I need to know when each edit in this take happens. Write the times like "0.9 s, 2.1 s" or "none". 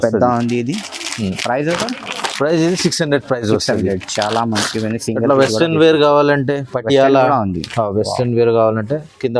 none